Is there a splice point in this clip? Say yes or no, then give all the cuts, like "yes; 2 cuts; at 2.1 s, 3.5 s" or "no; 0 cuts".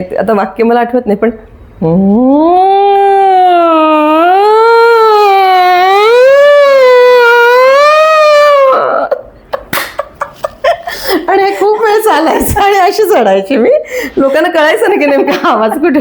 no; 0 cuts